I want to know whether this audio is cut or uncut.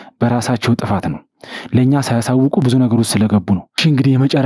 uncut